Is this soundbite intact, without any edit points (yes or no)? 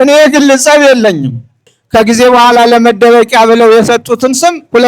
no